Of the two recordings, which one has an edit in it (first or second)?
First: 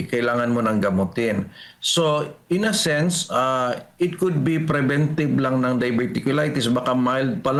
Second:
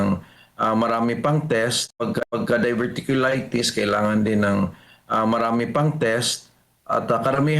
second